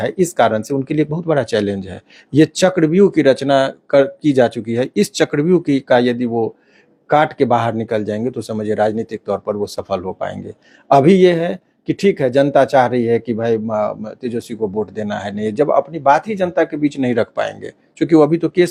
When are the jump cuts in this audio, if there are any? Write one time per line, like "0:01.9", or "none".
none

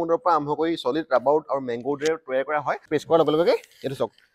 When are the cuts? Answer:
0:02.9

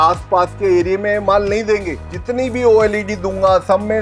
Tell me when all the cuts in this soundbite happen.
0:01.9

